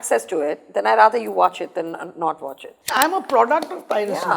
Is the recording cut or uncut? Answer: cut